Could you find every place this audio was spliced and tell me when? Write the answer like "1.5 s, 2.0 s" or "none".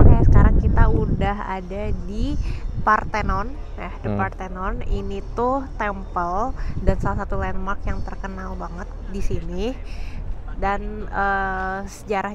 none